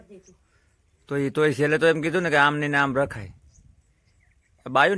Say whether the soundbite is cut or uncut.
uncut